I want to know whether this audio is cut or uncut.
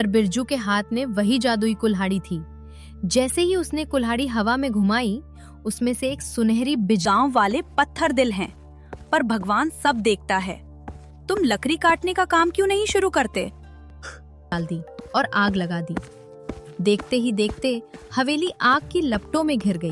cut